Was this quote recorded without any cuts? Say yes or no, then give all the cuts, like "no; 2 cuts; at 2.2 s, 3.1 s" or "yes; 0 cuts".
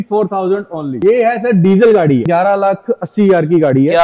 no; 2 cuts; at 0.9 s, 2.2 s